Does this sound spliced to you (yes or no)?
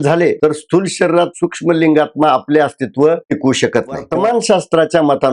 yes